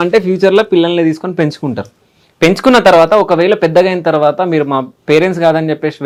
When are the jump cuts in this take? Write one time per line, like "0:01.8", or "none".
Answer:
none